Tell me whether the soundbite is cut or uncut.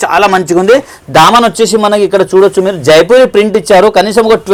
uncut